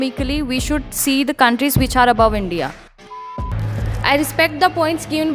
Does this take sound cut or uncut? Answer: cut